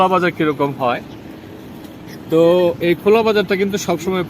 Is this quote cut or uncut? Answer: uncut